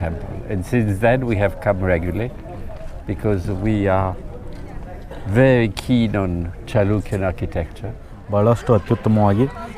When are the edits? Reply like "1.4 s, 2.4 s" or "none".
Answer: 8.1 s